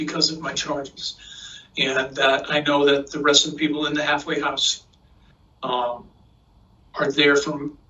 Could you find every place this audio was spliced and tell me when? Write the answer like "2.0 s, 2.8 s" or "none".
none